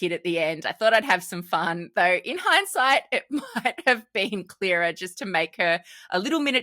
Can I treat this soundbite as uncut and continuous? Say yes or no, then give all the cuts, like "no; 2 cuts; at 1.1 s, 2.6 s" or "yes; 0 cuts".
no; 1 cut; at 1.8 s